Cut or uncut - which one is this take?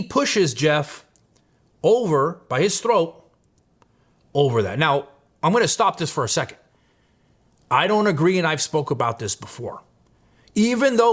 uncut